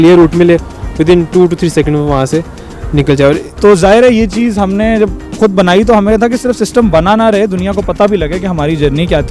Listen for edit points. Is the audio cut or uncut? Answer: cut